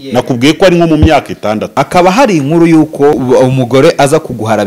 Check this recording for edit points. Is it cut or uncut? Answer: cut